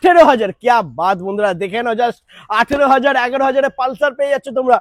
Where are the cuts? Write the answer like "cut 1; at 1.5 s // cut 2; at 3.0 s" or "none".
none